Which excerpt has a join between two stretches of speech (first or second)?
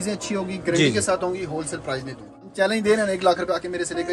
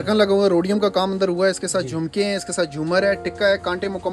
first